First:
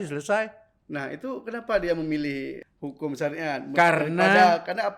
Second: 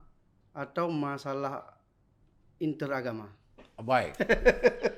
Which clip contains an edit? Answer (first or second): first